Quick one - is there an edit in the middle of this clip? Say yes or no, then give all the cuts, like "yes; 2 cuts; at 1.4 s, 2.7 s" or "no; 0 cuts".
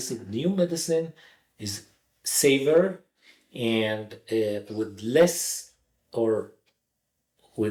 no; 0 cuts